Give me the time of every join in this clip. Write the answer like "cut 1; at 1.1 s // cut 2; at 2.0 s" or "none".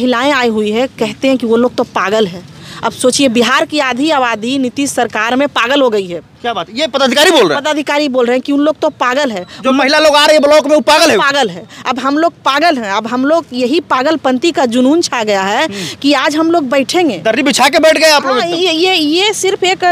none